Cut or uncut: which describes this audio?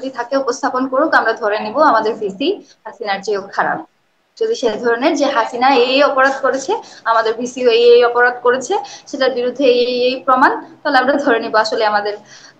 uncut